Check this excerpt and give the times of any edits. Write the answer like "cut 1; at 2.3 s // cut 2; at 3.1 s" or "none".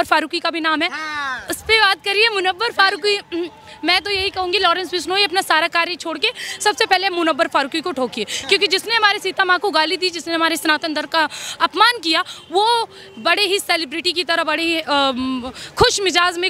none